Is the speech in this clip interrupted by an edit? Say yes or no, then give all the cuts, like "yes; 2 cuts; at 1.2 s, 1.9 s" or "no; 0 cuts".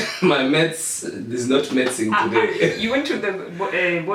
no; 0 cuts